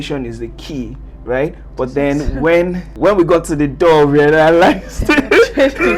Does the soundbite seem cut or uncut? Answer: cut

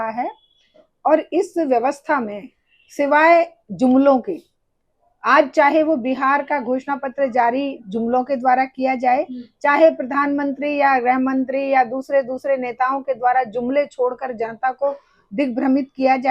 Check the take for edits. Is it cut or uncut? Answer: uncut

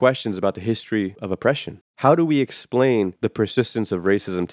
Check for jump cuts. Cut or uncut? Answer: cut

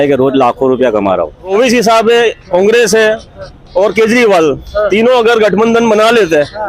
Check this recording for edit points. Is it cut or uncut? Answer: cut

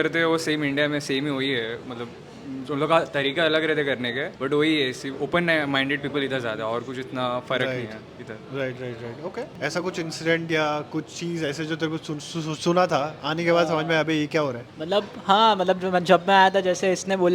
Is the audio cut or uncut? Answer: uncut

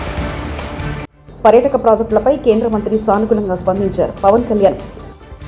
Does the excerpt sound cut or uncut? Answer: cut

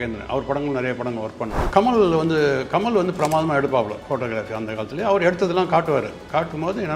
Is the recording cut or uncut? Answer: cut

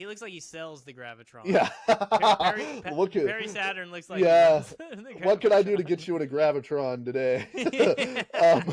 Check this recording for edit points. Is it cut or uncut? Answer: uncut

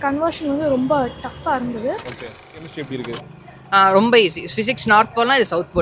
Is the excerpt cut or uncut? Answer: cut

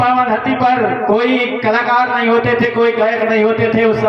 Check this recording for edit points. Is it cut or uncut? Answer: cut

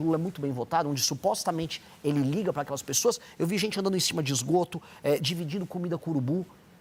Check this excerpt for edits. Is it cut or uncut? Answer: uncut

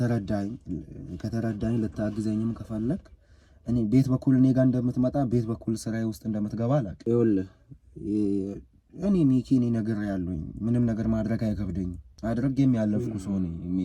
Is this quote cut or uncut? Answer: cut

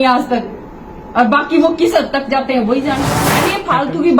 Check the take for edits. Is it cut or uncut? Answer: cut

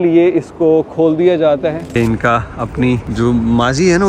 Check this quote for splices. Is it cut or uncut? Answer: cut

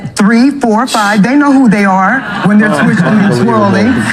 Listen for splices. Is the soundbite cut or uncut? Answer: uncut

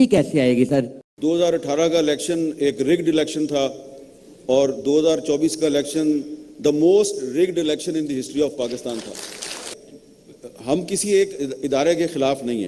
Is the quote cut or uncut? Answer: cut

